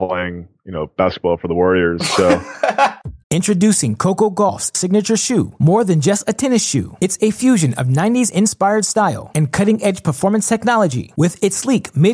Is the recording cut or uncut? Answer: cut